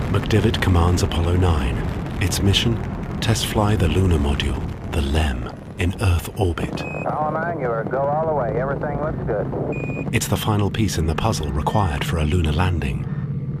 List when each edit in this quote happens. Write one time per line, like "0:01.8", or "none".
0:03.1